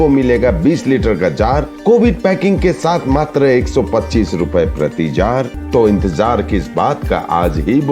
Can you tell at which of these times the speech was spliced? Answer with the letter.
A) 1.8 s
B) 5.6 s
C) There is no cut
B